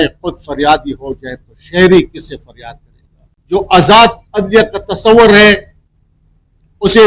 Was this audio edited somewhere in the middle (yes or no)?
yes